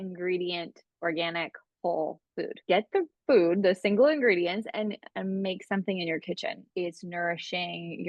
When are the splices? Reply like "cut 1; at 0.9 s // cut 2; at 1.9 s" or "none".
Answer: cut 1; at 2.6 s // cut 2; at 6.7 s